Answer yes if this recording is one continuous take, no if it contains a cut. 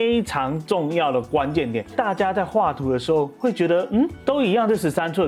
yes